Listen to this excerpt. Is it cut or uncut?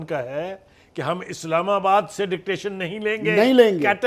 uncut